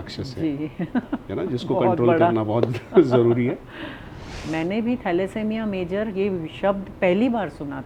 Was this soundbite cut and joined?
yes; 1 cut; at 4.4 s

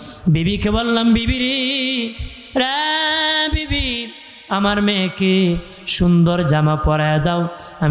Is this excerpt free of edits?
yes; 0 cuts

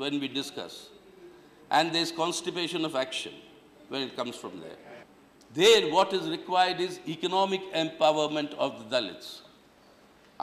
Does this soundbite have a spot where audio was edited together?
yes; 1 cut; at 5.0 s

